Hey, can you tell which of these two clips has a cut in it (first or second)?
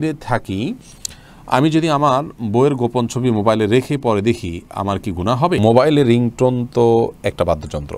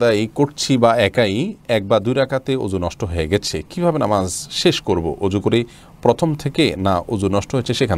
first